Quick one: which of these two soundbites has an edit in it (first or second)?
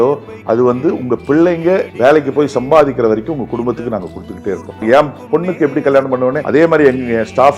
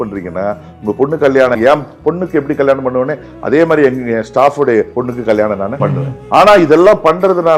first